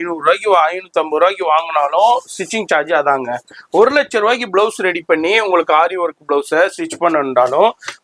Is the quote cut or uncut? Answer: uncut